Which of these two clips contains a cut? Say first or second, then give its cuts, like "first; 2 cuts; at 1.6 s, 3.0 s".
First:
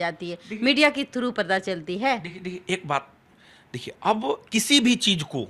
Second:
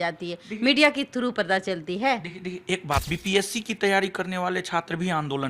second; 1 cut; at 3.1 s